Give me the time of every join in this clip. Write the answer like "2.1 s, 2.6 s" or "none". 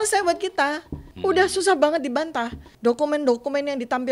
1.0 s, 2.7 s